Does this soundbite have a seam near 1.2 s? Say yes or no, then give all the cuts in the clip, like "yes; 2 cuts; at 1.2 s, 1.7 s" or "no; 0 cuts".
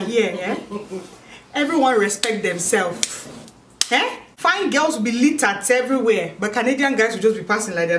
no; 1 cut; at 4.3 s